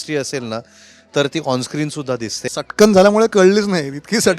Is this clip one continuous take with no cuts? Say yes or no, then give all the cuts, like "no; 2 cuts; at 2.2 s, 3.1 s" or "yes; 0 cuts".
no; 1 cut; at 2.4 s